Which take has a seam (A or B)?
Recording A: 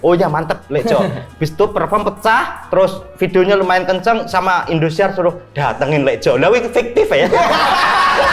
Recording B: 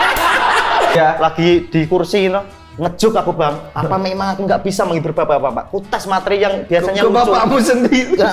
B